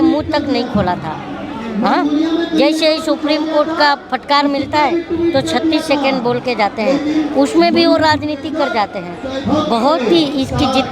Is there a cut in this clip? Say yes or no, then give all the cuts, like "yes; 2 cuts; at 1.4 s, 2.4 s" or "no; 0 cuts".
yes; 1 cut; at 9.3 s